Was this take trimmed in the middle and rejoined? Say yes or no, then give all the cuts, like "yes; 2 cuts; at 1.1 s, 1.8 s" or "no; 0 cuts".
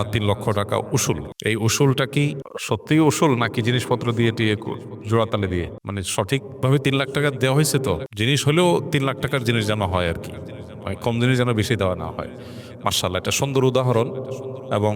yes; 4 cuts; at 1.3 s, 2.5 s, 5.8 s, 8.1 s